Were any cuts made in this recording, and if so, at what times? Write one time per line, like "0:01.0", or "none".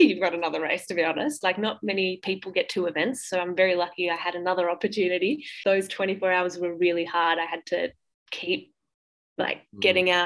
0:05.5